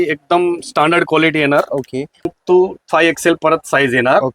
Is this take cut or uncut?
cut